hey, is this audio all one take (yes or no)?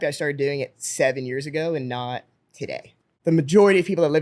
no